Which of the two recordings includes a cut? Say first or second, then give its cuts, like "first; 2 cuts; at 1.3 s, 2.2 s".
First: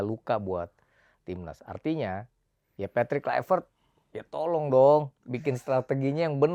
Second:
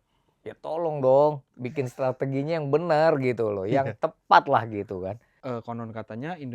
second; 1 cut; at 5.3 s